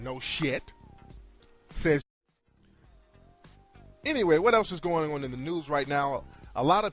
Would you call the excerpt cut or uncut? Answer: uncut